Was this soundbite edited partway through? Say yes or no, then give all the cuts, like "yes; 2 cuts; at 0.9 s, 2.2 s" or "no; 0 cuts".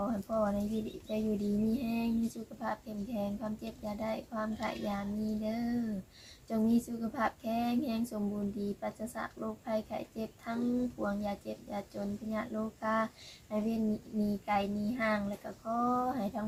no; 0 cuts